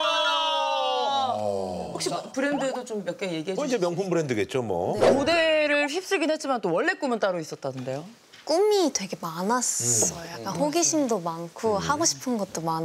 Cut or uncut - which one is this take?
cut